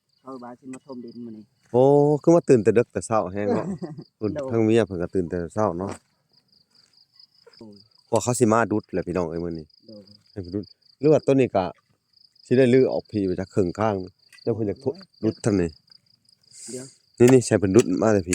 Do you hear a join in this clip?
yes; 1 cut; at 7.4 s

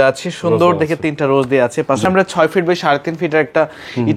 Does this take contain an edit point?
yes; 1 cut; at 2.1 s

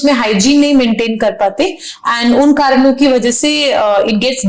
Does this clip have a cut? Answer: no; 0 cuts

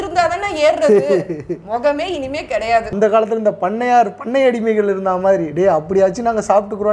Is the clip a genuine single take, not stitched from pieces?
no; 1 cut; at 2.9 s

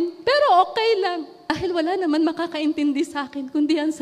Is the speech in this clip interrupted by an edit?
yes; 1 cut; at 1.5 s

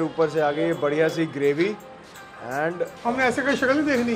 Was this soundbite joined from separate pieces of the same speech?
yes; 1 cut; at 3.0 s

